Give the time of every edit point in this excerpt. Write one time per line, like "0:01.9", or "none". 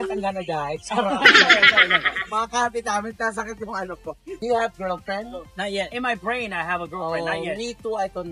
0:04.3